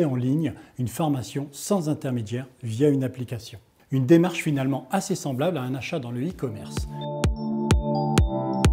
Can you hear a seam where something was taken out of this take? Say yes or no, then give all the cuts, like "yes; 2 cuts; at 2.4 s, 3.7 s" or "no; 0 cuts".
yes; 1 cut; at 6.6 s